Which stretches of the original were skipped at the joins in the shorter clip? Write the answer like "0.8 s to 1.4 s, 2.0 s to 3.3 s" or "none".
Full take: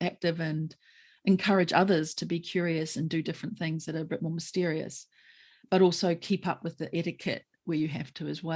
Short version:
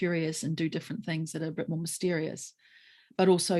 none